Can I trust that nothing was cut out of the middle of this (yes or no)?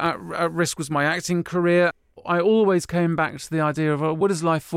no